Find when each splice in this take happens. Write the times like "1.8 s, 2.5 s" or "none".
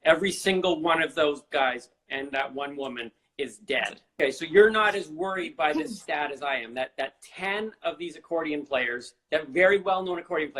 4.2 s